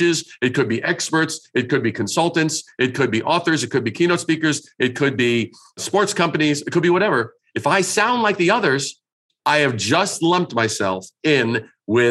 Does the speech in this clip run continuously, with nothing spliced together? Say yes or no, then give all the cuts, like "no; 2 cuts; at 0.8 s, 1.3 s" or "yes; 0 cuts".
yes; 0 cuts